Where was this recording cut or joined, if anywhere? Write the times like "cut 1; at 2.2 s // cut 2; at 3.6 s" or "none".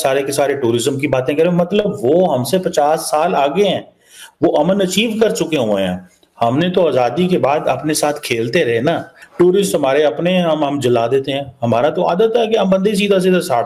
cut 1; at 9.2 s